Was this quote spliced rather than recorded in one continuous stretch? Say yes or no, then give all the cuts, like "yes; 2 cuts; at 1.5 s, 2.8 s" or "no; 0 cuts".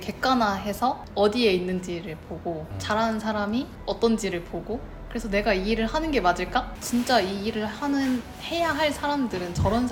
yes; 2 cuts; at 1.0 s, 6.8 s